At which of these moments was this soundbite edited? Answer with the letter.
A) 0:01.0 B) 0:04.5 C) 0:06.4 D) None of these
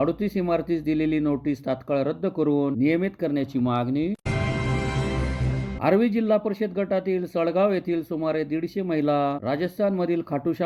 D